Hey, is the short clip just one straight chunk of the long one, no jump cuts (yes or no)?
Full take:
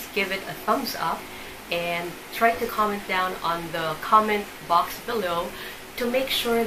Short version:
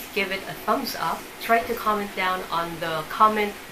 no